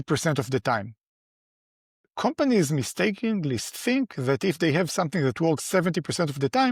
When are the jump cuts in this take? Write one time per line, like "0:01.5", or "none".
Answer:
none

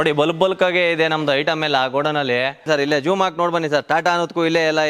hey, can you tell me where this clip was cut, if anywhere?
0:02.6

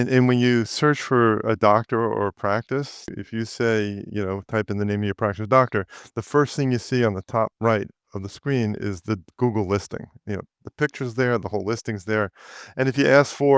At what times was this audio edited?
0:03.1

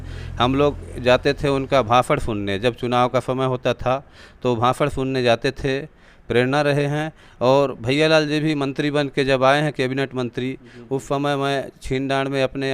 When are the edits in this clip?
none

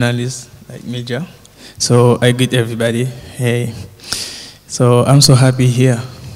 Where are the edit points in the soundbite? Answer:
0:02.8

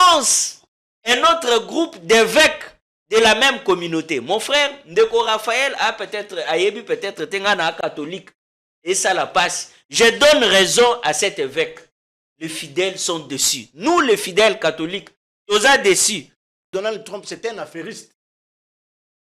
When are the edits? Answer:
0:16.7

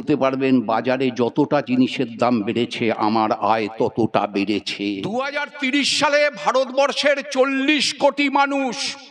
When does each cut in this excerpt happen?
0:05.1

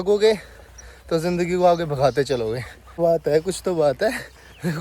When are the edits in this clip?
0:03.0

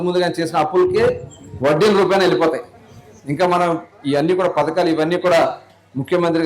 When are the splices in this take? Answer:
0:01.2
0:03.1

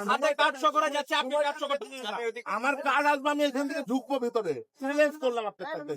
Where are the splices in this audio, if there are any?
0:02.4
0:04.8

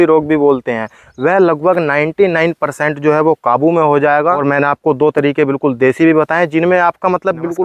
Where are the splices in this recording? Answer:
0:04.4

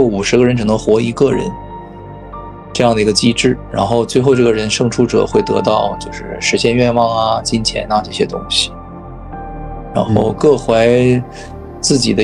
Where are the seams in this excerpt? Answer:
none

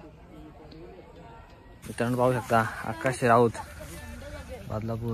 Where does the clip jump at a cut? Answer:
0:01.8

